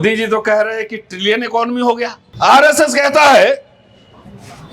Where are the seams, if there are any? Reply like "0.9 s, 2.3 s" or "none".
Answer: 2.2 s